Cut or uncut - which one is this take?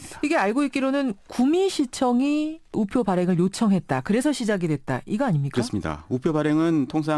uncut